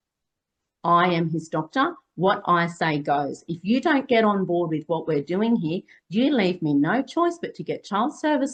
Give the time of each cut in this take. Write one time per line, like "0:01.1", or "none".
none